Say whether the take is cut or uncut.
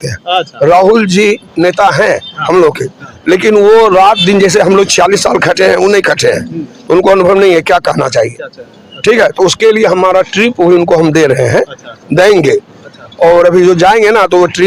uncut